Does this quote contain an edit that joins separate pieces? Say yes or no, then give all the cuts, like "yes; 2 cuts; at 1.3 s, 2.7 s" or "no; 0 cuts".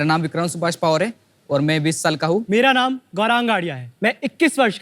yes; 2 cuts; at 2.4 s, 3.8 s